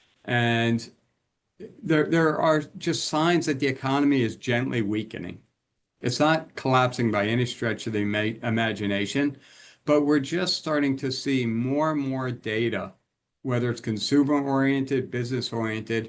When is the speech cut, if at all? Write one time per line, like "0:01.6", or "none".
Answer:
none